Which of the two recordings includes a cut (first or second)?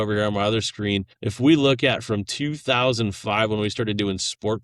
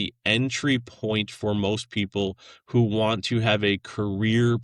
first